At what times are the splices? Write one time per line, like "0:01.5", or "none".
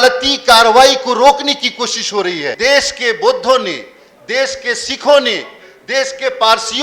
0:02.5